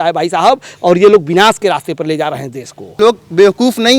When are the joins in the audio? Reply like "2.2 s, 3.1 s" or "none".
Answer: 3.0 s

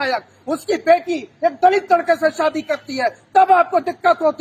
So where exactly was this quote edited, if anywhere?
none

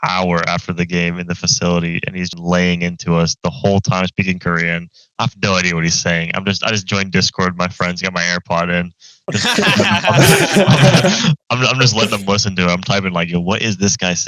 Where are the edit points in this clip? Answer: 2.3 s

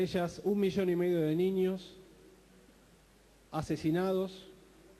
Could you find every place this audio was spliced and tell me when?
4.0 s

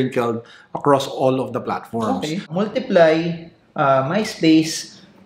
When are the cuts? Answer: 2.5 s

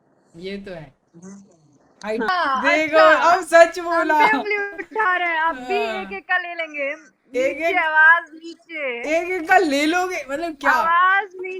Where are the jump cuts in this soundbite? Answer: 2.3 s

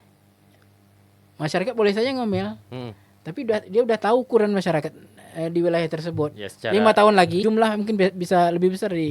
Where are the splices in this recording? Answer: 7.4 s

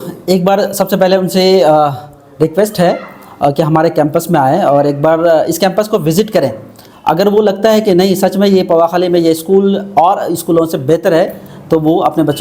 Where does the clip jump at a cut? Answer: none

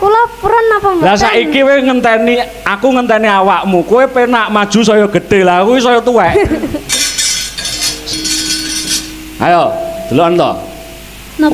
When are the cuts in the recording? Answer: 8.1 s

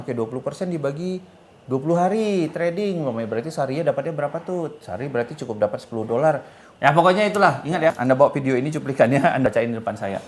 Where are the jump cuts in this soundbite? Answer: 6.8 s, 8.0 s, 9.4 s

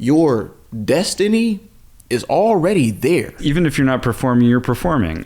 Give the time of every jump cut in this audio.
3.4 s

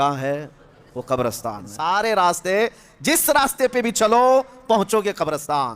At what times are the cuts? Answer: 1.7 s

